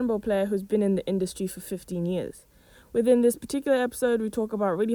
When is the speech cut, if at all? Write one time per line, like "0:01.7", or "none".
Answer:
none